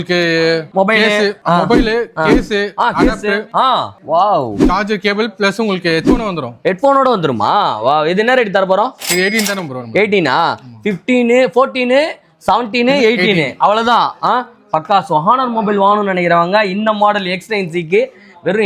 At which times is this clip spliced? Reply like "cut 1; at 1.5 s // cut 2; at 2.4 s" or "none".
none